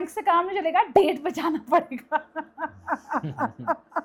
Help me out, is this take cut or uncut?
uncut